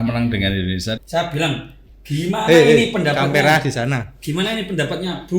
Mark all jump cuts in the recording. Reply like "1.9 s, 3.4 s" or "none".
1.0 s